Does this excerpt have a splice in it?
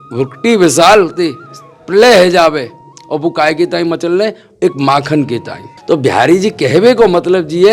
yes; 1 cut; at 5.7 s

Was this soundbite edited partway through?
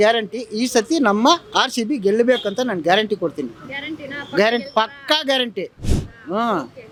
no; 0 cuts

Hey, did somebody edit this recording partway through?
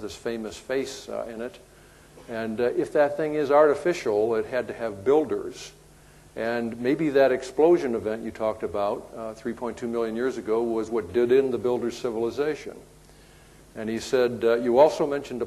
no; 0 cuts

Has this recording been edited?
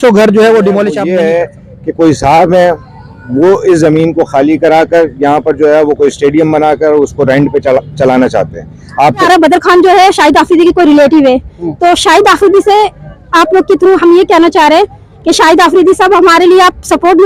yes; 2 cuts; at 1.0 s, 9.2 s

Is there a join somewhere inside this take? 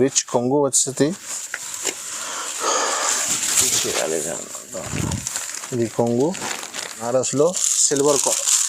yes; 1 cut; at 7.1 s

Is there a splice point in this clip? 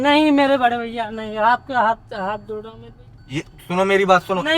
yes; 1 cut; at 3.7 s

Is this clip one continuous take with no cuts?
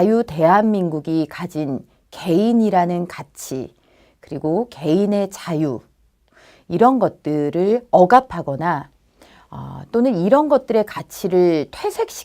no; 1 cut; at 11.2 s

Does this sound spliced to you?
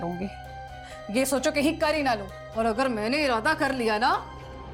no; 0 cuts

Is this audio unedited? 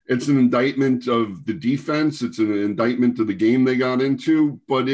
yes; 0 cuts

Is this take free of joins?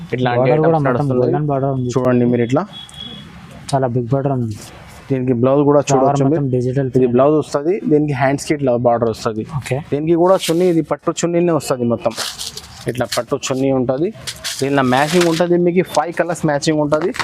yes; 0 cuts

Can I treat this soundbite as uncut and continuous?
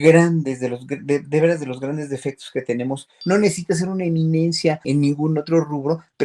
no; 2 cuts; at 3.1 s, 4.8 s

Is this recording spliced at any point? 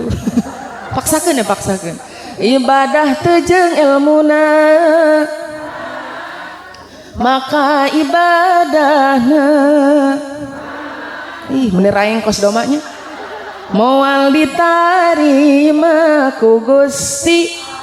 no; 0 cuts

